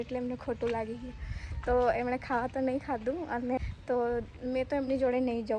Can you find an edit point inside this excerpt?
yes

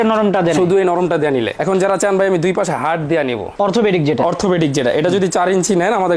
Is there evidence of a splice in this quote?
yes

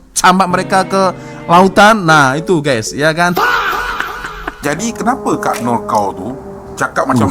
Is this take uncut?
no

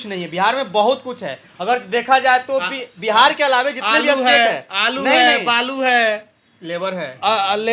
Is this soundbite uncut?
yes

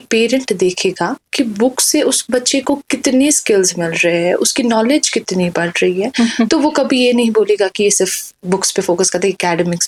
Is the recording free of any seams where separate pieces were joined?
yes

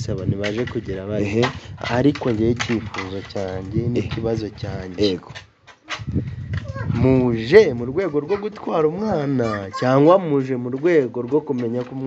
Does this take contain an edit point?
no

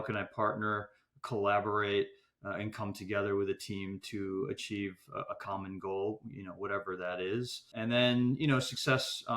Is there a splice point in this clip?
yes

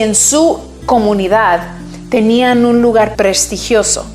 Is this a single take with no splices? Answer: no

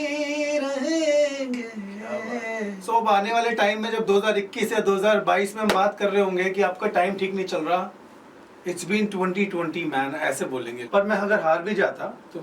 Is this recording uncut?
no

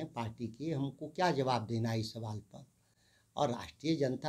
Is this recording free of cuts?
yes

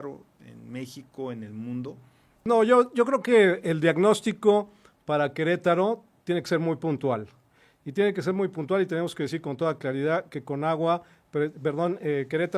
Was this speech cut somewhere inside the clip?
yes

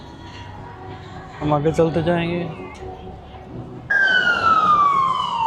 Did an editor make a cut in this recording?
yes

